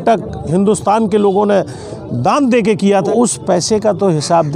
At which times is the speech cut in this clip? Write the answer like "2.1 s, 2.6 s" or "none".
3.1 s